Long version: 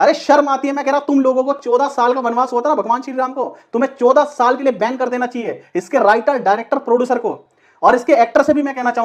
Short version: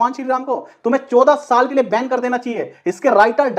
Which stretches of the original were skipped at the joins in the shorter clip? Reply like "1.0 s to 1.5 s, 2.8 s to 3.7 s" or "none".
none

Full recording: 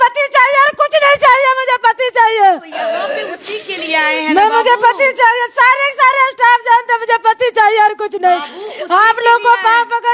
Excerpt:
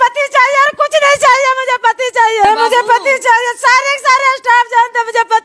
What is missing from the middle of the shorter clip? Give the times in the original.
2.4 s to 4.4 s

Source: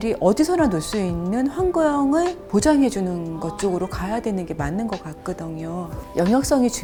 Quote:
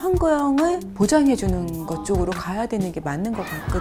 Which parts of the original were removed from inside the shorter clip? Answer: none

